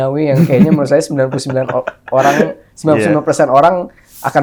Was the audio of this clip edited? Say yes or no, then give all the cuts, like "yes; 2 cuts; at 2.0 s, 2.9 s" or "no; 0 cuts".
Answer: no; 0 cuts